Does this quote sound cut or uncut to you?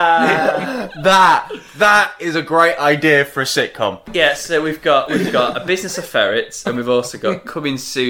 cut